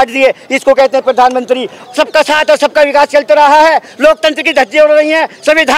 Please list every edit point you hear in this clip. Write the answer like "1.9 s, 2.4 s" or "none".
1.7 s